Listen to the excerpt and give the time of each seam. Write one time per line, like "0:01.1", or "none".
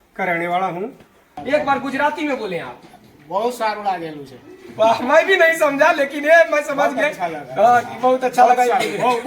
0:01.4